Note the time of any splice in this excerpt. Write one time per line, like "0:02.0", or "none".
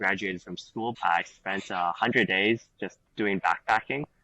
0:01.0